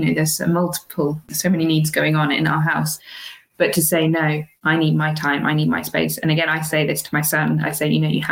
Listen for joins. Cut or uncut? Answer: cut